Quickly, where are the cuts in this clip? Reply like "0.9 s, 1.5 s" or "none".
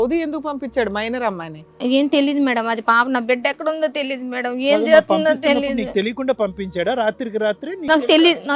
none

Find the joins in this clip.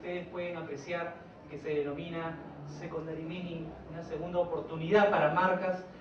4.5 s

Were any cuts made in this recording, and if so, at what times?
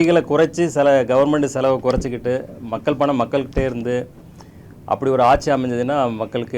none

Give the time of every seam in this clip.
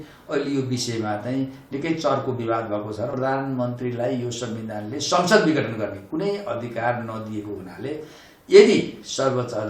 3.1 s

